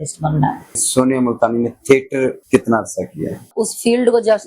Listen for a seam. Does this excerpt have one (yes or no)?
yes